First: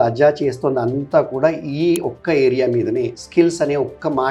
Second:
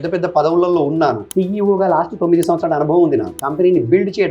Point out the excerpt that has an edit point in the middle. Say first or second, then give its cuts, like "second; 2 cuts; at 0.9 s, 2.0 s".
second; 2 cuts; at 1.2 s, 3.4 s